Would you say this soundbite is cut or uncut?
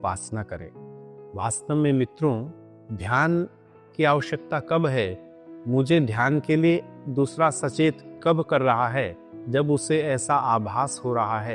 uncut